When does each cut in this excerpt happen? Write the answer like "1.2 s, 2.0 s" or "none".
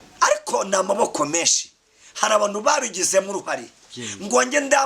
none